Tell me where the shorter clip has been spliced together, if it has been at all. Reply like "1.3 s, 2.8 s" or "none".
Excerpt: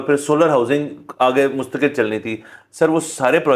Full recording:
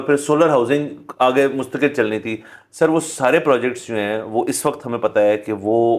none